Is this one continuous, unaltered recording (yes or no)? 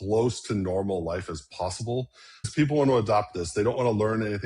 no